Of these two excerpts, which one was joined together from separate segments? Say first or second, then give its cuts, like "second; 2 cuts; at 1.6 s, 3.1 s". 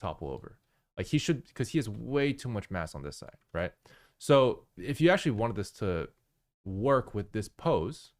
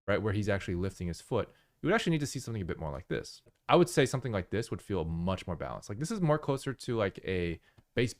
second; 1 cut; at 3.5 s